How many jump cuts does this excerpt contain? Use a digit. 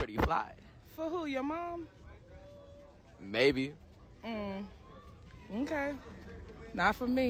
0